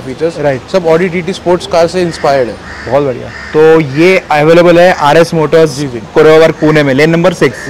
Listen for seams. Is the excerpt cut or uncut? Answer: uncut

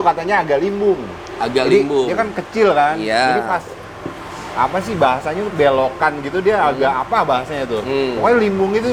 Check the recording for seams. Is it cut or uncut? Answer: uncut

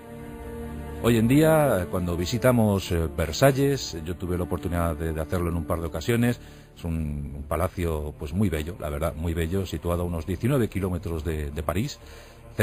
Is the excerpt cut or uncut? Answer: cut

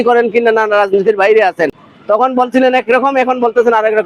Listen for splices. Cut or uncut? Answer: uncut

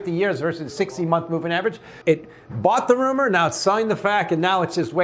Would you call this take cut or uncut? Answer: cut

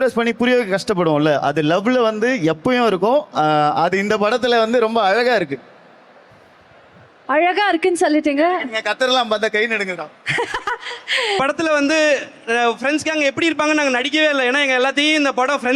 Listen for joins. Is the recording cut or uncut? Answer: cut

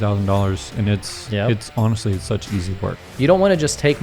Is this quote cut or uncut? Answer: cut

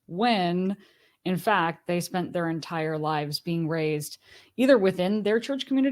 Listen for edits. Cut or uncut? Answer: uncut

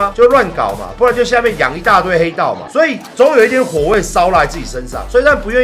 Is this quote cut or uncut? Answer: uncut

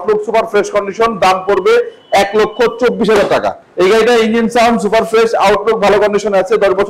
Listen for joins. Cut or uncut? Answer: uncut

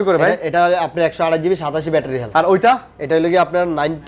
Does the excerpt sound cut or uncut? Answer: uncut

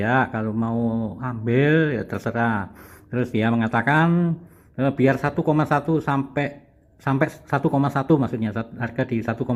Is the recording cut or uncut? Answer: uncut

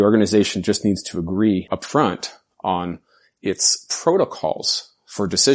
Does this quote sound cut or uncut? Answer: cut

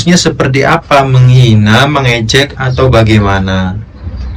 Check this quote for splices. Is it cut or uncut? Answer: uncut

